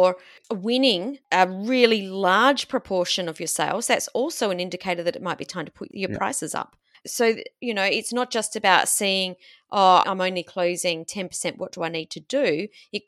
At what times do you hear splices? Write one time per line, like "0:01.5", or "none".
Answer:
0:01.2